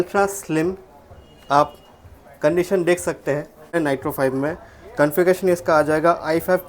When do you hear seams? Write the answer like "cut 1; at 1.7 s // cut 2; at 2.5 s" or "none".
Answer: cut 1; at 3.7 s